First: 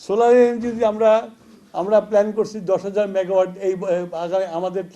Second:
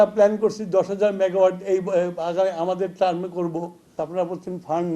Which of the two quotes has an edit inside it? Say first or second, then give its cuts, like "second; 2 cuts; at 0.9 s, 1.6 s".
second; 1 cut; at 4.0 s